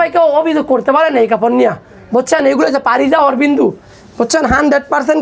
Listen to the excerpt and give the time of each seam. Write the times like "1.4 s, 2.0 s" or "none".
none